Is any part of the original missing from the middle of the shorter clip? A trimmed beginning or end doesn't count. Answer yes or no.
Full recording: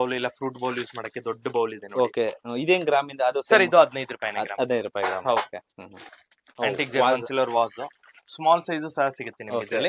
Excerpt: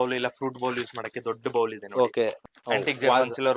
yes